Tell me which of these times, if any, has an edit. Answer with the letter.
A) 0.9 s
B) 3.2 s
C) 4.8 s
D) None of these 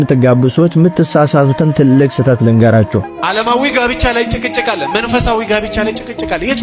B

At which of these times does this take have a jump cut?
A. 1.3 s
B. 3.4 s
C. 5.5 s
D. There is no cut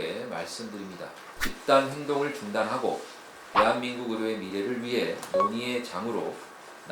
A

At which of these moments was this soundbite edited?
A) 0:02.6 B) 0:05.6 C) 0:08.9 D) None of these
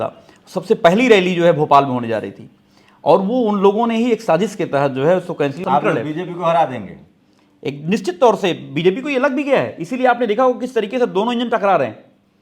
B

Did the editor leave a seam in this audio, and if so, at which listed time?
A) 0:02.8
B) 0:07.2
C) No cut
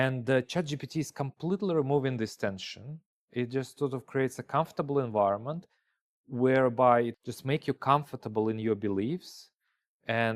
B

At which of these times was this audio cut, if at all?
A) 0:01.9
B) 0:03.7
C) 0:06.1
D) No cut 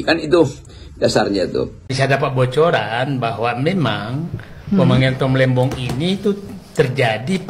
A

